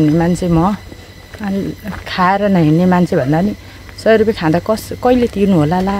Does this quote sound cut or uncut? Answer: uncut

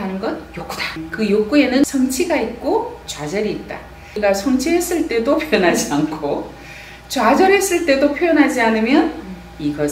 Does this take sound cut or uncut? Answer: cut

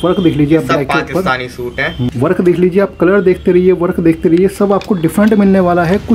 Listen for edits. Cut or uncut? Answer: cut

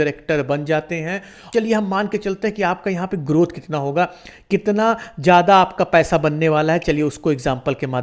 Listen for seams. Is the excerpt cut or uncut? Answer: cut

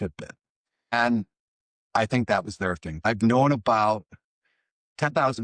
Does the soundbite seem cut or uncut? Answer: cut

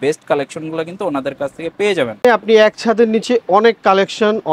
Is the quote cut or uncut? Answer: cut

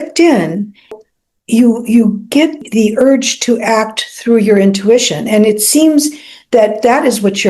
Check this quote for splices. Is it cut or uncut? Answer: cut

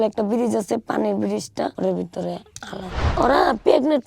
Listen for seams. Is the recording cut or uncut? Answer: cut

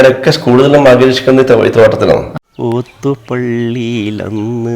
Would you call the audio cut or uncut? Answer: cut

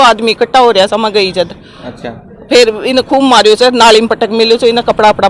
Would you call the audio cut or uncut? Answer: uncut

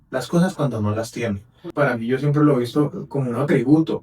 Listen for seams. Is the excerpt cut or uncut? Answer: cut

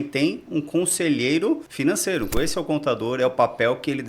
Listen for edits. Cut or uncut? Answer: cut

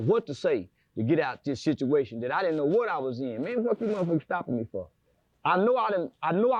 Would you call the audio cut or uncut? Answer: uncut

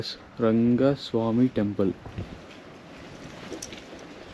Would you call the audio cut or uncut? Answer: uncut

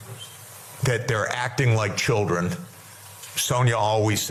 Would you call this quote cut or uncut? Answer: uncut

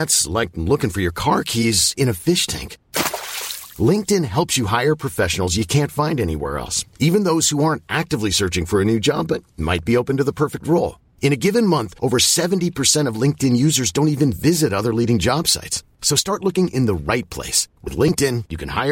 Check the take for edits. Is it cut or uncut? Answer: uncut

